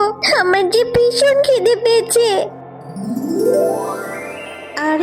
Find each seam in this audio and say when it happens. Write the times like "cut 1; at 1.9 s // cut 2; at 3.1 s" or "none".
none

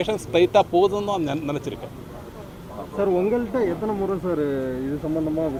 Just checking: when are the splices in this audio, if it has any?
none

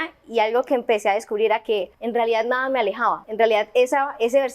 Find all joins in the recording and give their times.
cut 1; at 2.0 s // cut 2; at 3.2 s

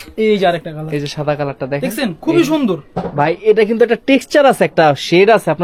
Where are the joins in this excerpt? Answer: none

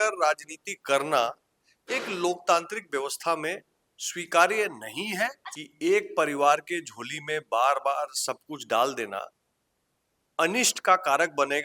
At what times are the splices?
cut 1; at 5.5 s

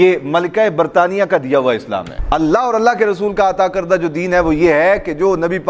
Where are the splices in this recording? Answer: cut 1; at 2.1 s

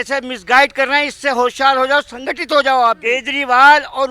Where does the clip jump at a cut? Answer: cut 1; at 3.0 s

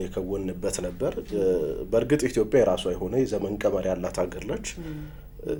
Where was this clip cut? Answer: none

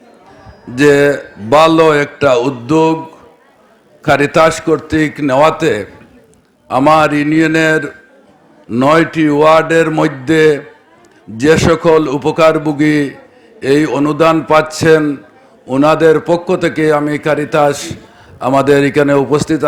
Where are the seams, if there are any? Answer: none

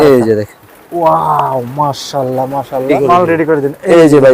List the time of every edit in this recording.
cut 1; at 2.9 s

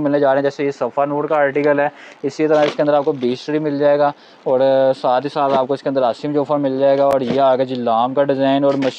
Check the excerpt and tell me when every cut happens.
none

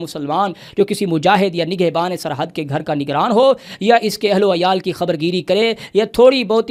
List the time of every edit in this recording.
none

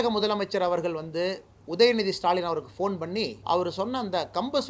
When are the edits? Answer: cut 1; at 3.4 s

